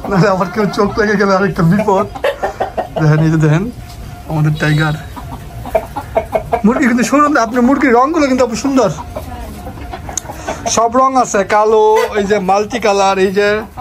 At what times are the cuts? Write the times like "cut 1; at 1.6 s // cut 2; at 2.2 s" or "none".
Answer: none